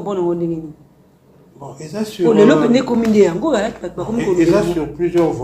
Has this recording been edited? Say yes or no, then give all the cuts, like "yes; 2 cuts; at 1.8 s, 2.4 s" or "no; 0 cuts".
no; 0 cuts